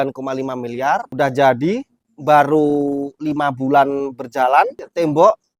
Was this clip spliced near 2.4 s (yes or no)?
no